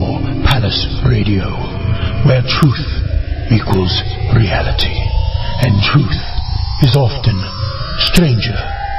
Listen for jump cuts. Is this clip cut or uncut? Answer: uncut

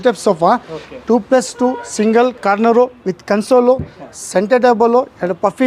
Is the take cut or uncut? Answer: uncut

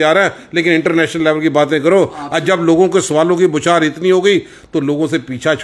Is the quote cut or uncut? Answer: uncut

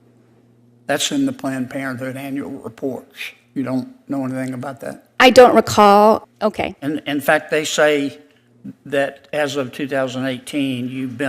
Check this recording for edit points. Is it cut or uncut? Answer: cut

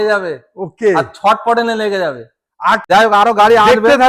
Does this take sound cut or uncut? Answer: cut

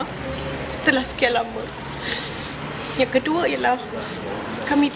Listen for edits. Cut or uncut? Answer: uncut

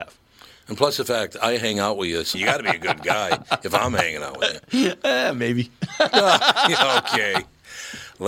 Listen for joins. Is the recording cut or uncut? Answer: uncut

